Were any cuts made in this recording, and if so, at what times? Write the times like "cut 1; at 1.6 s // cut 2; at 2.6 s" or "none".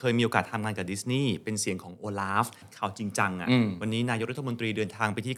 cut 1; at 2.6 s